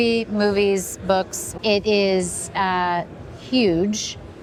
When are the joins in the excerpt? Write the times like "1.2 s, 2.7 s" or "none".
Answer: none

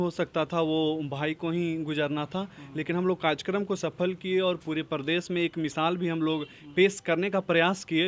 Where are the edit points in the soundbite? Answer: none

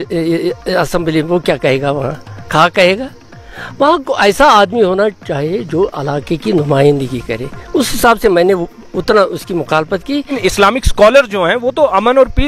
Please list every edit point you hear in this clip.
10.3 s

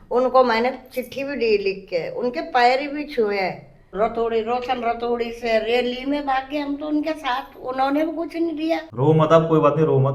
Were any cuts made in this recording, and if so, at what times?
3.9 s, 8.9 s

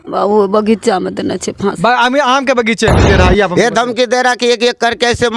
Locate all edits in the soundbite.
3.0 s

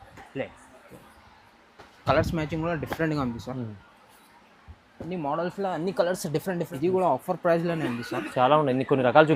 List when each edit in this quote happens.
6.7 s

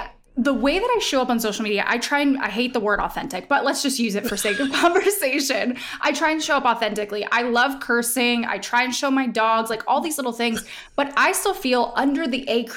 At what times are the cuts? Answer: none

